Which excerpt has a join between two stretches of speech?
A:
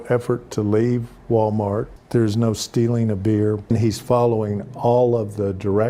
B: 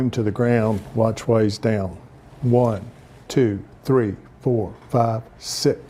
A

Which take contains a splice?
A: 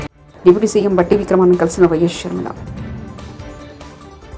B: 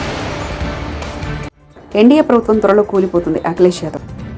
B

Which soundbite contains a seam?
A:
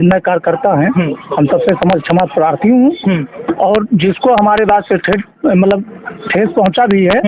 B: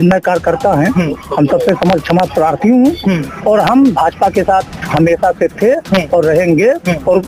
B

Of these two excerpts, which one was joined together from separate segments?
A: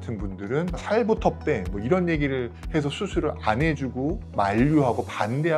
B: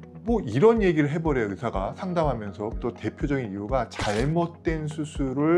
B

